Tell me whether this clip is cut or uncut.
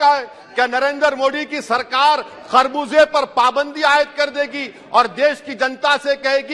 uncut